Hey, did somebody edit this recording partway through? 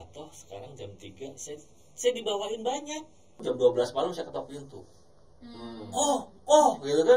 yes; 1 cut; at 3.4 s

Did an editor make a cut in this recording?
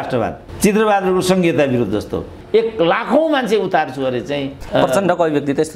yes; 2 cuts; at 2.4 s, 4.5 s

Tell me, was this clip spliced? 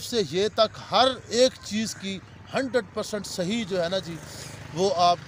no; 0 cuts

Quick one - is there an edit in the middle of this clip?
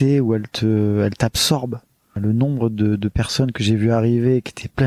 yes; 1 cut; at 2.2 s

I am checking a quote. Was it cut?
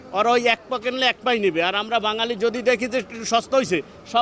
no; 0 cuts

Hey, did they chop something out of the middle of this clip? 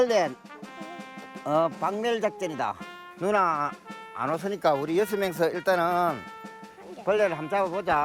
no; 0 cuts

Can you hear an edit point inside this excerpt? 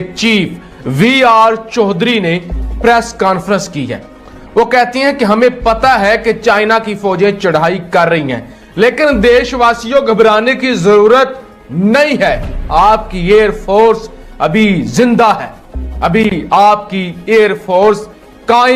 no; 0 cuts

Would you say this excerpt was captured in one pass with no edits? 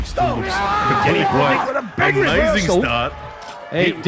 yes; 0 cuts

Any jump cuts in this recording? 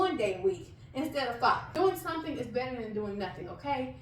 yes; 1 cut; at 1.7 s

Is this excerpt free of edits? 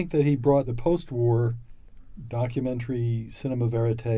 yes; 0 cuts

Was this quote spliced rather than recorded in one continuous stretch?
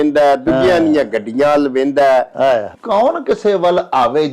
yes; 1 cut; at 2.7 s

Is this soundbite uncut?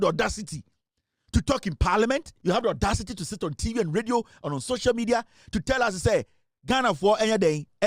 no; 1 cut; at 2.3 s

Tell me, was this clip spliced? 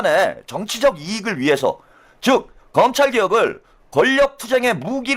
no; 0 cuts

